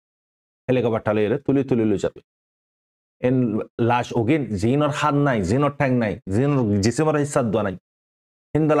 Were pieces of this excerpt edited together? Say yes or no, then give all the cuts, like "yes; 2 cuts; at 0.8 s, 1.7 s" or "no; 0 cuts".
no; 0 cuts